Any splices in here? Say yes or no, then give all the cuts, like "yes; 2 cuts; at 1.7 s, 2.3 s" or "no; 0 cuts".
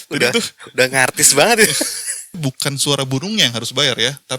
yes; 1 cut; at 2.4 s